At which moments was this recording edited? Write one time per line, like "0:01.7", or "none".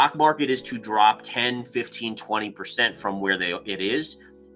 none